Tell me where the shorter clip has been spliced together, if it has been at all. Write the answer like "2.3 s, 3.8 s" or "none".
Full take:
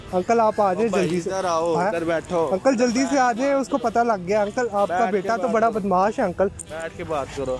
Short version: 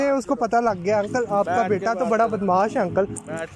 none